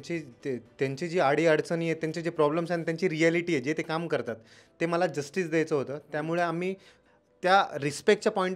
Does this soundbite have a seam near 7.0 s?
yes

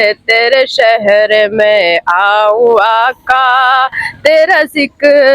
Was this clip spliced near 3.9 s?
no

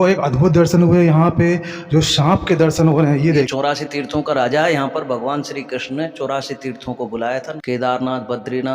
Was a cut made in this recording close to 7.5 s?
yes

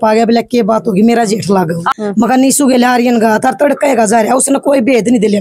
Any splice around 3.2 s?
no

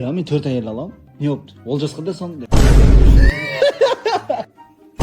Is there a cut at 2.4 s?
yes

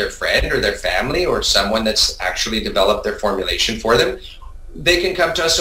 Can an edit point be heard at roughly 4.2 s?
no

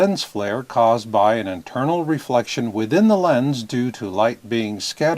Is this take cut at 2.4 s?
yes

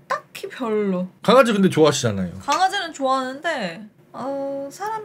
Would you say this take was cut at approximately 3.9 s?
no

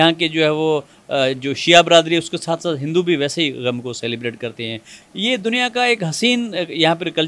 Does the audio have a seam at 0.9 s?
no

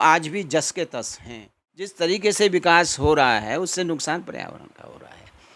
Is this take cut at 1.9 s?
yes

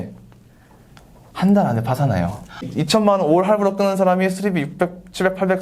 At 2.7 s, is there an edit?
yes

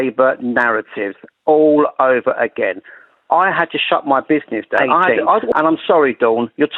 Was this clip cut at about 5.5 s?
yes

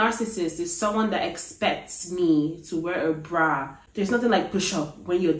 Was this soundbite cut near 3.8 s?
yes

